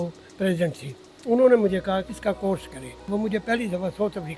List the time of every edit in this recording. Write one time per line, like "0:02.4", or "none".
0:02.1
0:03.0